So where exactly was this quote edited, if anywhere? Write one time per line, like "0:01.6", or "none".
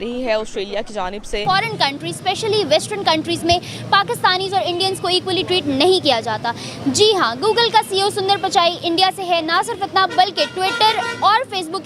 0:01.4